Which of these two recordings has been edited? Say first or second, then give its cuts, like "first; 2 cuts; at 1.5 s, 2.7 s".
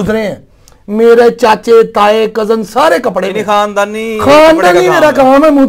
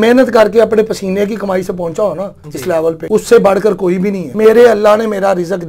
second; 2 cuts; at 3.0 s, 4.2 s